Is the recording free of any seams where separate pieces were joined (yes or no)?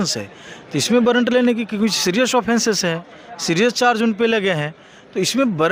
yes